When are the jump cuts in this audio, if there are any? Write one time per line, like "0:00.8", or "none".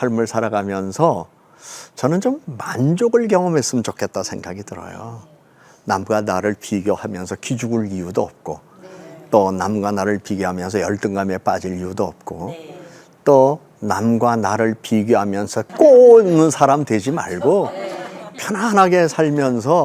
0:15.7